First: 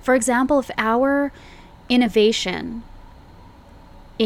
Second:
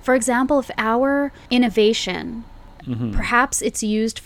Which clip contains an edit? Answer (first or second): second